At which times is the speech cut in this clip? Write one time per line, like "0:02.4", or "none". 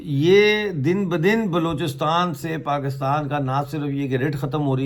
none